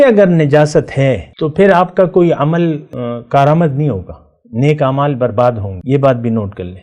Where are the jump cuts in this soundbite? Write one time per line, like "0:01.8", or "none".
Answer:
0:01.3
0:02.9
0:05.7